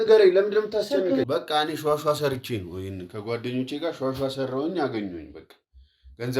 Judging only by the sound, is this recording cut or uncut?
cut